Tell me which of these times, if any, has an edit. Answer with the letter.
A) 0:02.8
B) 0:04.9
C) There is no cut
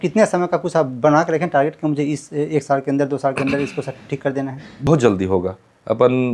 B